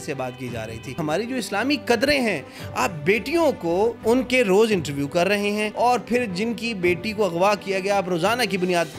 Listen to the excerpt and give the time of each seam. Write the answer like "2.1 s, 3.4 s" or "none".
1.0 s, 4.0 s, 5.7 s